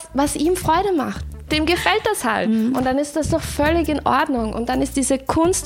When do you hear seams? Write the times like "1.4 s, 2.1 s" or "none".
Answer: 1.2 s, 2.5 s